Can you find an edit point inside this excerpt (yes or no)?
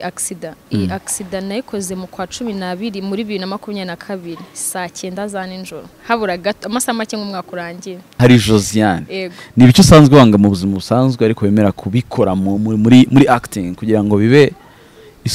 yes